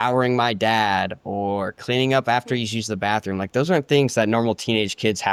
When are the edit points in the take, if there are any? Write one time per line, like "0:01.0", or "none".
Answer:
none